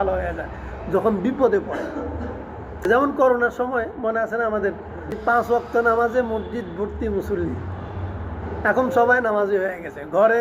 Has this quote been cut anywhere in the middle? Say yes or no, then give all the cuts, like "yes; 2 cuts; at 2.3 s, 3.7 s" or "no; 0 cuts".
yes; 2 cuts; at 2.8 s, 5.2 s